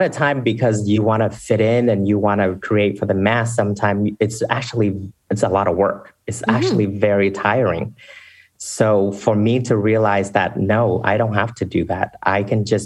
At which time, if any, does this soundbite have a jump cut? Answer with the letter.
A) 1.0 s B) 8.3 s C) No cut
A